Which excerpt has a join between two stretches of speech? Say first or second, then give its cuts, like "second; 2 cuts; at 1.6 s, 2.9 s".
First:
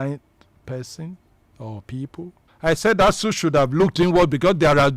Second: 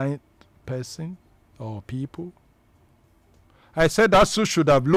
first; 1 cut; at 2.4 s